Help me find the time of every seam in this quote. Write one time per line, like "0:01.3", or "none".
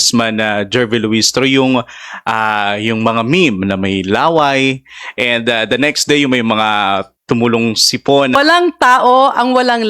0:08.4